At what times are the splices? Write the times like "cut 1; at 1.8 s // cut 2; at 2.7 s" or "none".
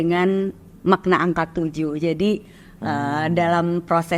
none